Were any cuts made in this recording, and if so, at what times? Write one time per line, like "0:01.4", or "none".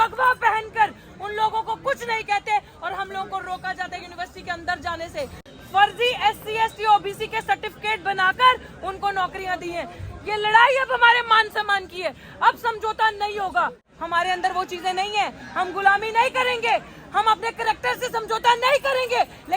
0:05.5
0:13.9